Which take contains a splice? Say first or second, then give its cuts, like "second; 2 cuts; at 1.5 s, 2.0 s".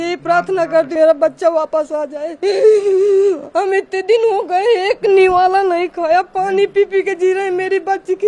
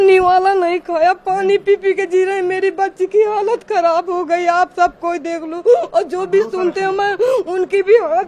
first; 1 cut; at 0.9 s